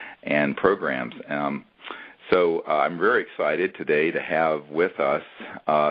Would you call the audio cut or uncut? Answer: cut